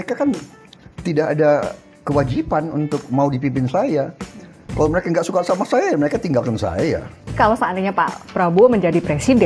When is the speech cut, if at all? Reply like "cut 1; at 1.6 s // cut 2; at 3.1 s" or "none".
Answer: cut 1; at 7.3 s